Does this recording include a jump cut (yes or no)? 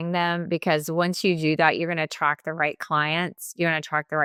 no